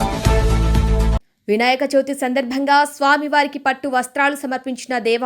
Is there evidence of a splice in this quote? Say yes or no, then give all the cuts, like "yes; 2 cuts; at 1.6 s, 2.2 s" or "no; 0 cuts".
yes; 1 cut; at 1.3 s